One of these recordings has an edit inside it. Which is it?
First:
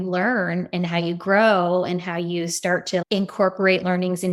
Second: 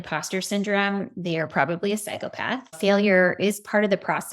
second; 1 cut; at 2.8 s

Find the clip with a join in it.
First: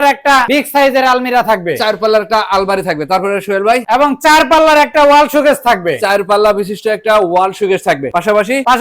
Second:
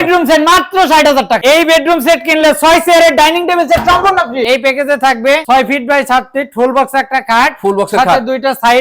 second; 2 cuts; at 1.4 s, 4.4 s

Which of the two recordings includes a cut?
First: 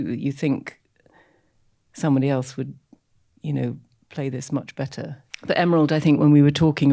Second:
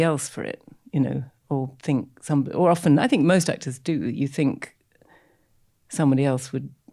first; 1 cut; at 5.2 s

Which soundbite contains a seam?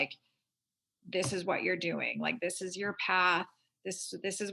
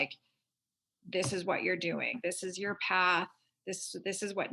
second; 1 cut; at 2.1 s

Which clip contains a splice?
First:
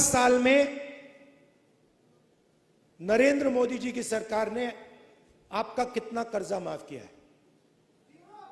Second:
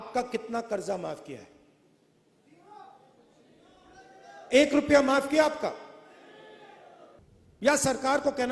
second; 1 cut; at 7.2 s

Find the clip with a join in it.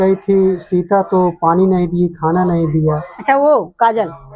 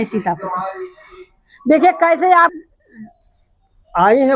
second; 1 cut; at 2.5 s

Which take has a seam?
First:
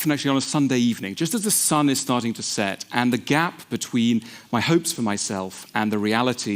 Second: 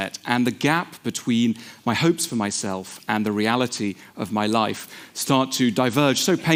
first; 1 cut; at 1.6 s

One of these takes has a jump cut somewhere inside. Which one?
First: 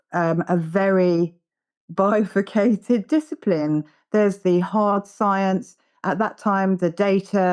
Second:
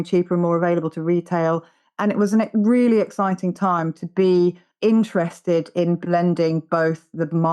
second; 1 cut; at 4.7 s

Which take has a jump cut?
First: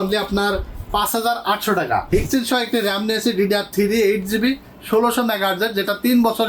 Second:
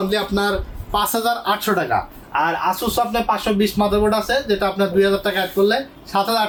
first; 1 cut; at 2.2 s

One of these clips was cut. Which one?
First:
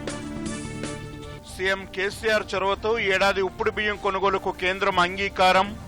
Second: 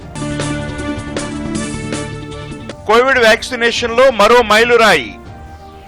first; 1 cut; at 1.3 s

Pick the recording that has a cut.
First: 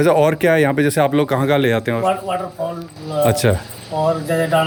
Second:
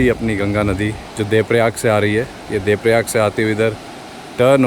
second; 1 cut; at 1.1 s

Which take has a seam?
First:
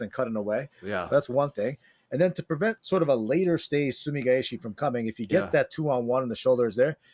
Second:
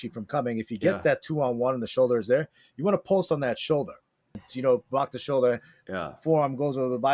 second; 1 cut; at 4.5 s

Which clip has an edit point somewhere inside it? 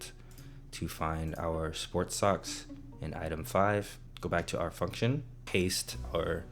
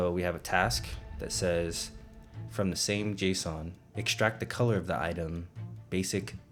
first; 2 cuts; at 4.0 s, 5.3 s

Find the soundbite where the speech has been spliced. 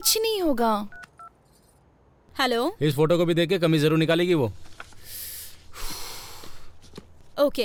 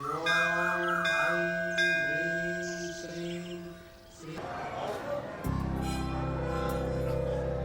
second; 1 cut; at 4.3 s

